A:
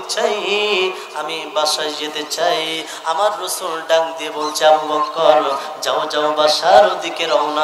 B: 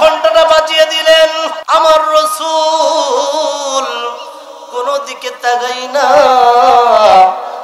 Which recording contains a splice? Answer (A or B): B